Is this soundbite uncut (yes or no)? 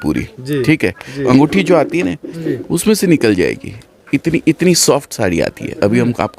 no